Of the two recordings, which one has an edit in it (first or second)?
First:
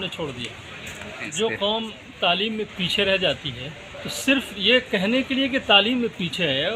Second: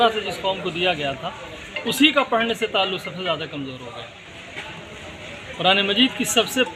first